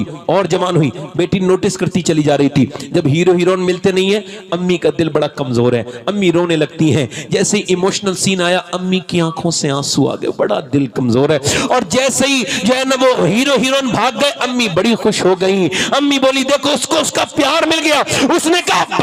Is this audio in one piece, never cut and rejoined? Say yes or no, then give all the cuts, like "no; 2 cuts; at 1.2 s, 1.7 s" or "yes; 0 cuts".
yes; 0 cuts